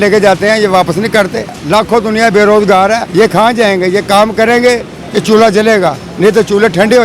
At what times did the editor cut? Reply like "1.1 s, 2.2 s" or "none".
1.5 s, 3.1 s, 6.0 s